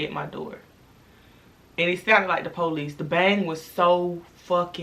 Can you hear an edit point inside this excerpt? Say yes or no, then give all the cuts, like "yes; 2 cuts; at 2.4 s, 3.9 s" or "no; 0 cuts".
no; 0 cuts